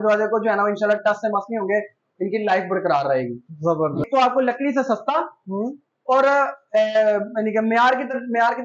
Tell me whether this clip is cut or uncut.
cut